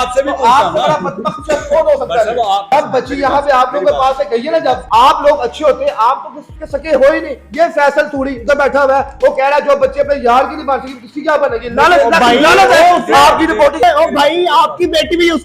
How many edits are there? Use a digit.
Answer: 3